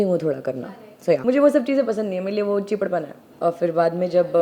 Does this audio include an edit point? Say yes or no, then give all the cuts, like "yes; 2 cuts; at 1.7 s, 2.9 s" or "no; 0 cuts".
yes; 2 cuts; at 1.2 s, 3.2 s